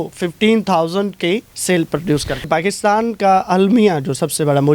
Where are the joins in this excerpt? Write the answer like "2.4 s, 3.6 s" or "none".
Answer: 1.5 s, 2.5 s